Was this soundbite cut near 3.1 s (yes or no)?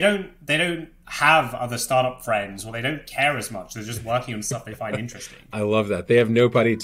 no